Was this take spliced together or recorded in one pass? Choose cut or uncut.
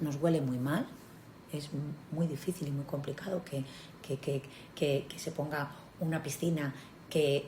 uncut